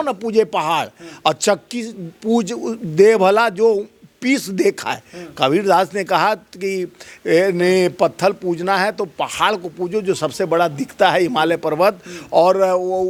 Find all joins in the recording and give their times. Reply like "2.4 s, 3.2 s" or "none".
none